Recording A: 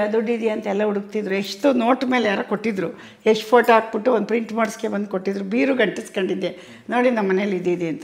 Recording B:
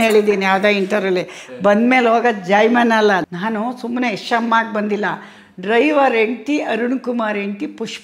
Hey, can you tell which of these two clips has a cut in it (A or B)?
B